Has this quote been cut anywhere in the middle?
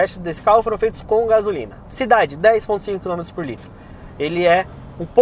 no; 0 cuts

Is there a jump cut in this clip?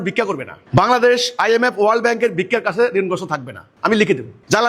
no; 0 cuts

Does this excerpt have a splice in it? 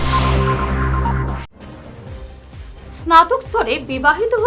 yes; 1 cut; at 1.4 s

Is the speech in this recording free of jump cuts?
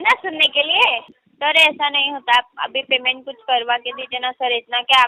no; 1 cut; at 1.1 s

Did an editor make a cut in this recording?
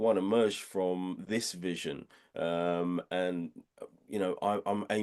no; 0 cuts

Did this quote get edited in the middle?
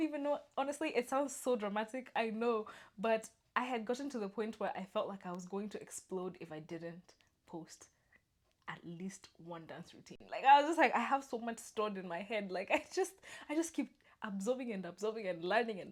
no; 0 cuts

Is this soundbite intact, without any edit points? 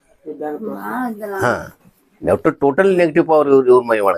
yes; 0 cuts

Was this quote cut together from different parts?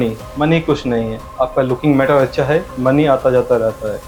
no; 0 cuts

